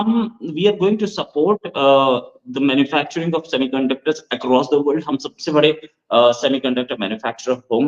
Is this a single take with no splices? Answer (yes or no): yes